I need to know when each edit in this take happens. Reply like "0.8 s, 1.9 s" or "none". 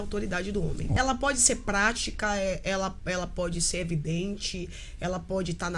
0.9 s

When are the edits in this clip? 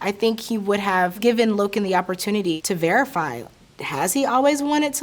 1.2 s

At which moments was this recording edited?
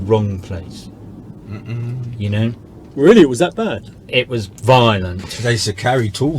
5.2 s

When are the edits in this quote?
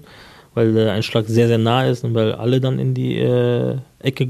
none

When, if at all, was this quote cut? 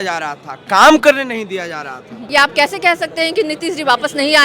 2.2 s

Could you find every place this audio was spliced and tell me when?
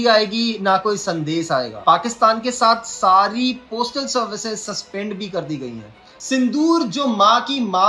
6.1 s

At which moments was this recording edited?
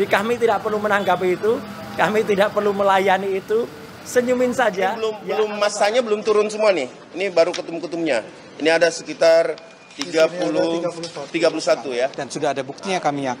5.1 s, 12.2 s

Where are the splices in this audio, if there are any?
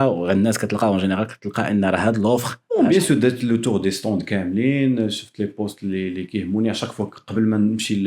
2.6 s

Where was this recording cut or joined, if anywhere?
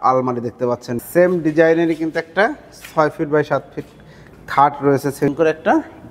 1.0 s, 5.3 s

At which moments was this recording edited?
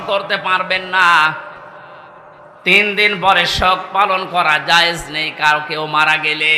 none

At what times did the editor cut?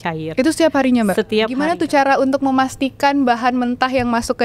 1.6 s

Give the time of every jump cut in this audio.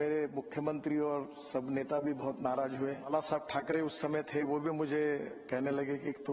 3.1 s

